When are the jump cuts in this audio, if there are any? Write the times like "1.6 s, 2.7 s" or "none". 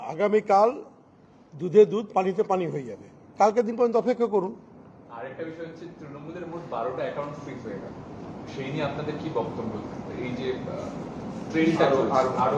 none